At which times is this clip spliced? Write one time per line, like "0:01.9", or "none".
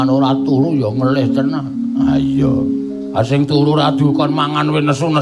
none